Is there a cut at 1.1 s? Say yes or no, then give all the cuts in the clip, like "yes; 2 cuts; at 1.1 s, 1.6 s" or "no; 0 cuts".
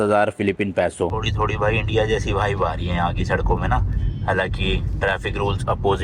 yes; 1 cut; at 1.1 s